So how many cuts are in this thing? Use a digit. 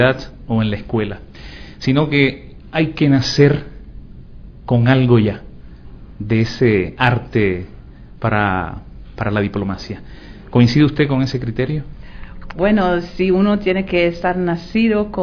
1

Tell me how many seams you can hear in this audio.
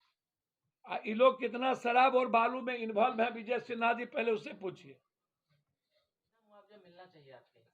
1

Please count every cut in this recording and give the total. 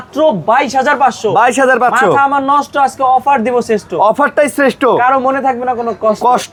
0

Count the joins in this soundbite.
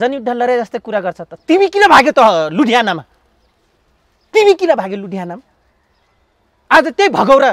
0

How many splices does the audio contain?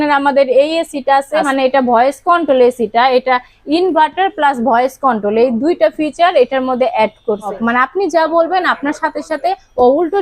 2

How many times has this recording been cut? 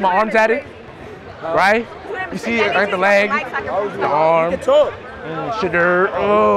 0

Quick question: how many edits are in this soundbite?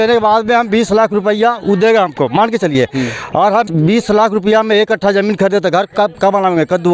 1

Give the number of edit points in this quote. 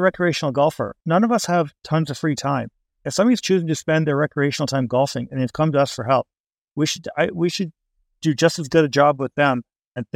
1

